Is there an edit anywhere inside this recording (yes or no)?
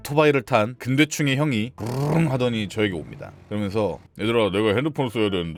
no